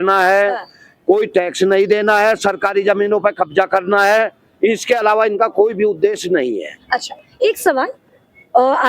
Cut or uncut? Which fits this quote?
uncut